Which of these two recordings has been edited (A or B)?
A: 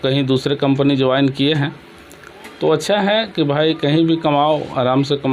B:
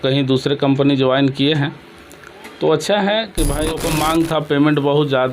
B